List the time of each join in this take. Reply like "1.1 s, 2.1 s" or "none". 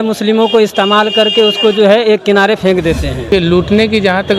3.3 s